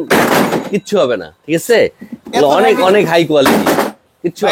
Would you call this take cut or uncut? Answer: uncut